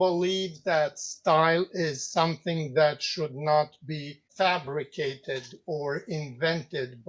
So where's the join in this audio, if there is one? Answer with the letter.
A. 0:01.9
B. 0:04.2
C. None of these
B